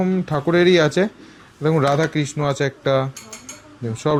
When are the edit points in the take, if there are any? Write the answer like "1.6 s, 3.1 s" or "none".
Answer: none